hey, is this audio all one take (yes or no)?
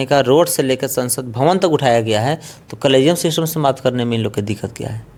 yes